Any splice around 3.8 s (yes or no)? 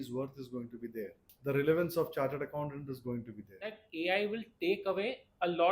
yes